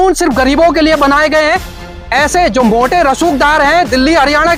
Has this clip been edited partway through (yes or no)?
no